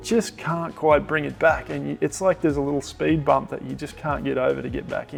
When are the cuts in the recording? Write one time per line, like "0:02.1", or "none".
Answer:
none